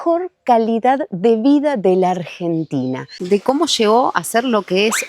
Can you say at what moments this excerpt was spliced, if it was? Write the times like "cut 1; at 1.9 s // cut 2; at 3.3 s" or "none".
cut 1; at 3.2 s